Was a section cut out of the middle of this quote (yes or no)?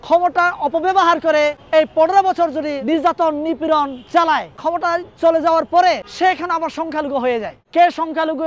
yes